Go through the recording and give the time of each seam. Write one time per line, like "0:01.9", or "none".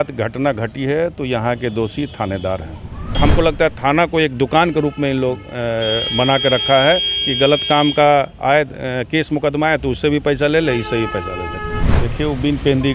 0:03.1
0:12.0